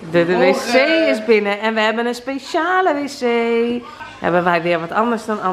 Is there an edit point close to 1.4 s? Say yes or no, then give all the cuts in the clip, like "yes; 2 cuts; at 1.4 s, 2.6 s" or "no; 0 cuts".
no; 1 cut; at 3.9 s